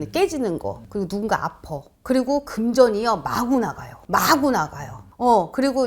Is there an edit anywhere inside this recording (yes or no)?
no